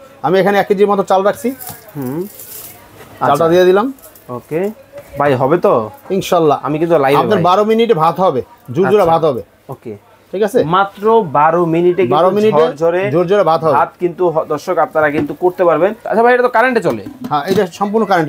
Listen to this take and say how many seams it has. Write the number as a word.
one